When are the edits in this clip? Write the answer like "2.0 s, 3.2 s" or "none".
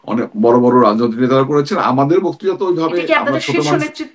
none